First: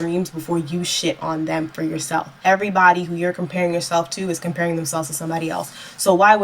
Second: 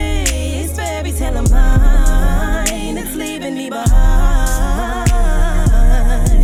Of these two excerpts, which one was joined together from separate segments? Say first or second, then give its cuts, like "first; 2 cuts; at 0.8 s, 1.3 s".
first; 1 cut; at 2.3 s